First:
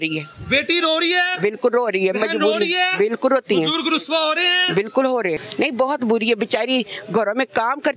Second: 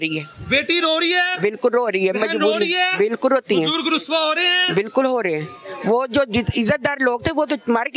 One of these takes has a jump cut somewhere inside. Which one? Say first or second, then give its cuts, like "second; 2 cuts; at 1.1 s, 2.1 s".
first; 1 cut; at 5.4 s